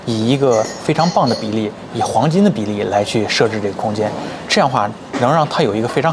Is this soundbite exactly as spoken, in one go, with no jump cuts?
yes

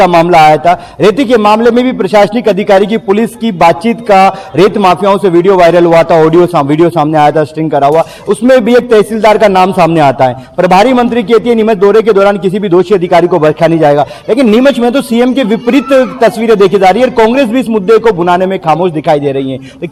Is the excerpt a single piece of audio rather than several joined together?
yes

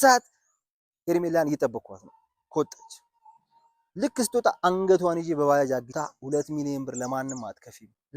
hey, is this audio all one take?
no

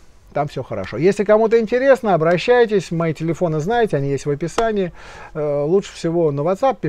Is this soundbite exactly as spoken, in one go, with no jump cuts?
yes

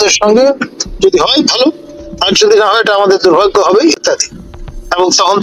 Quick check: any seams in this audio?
no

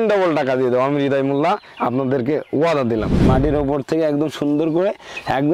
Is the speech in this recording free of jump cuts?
no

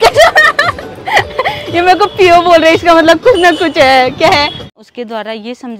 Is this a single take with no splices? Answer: no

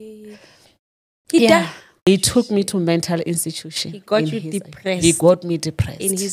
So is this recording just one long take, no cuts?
no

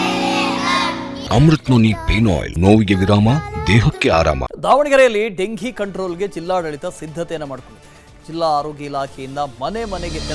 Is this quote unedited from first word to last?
no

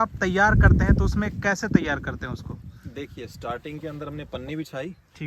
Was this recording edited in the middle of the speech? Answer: no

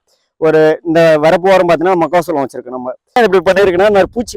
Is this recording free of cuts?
no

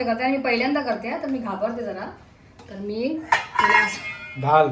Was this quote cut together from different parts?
no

